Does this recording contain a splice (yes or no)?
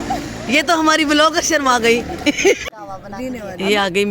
yes